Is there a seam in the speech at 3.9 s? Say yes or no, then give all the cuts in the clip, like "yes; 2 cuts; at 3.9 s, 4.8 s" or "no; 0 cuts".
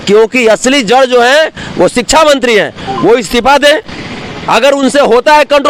no; 0 cuts